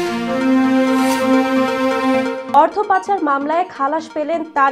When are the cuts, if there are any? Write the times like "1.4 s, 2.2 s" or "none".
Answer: none